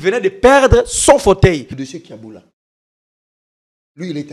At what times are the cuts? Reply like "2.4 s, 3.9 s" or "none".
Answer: 1.8 s